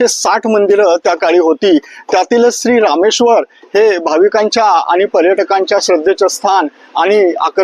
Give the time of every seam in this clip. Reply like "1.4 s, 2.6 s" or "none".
none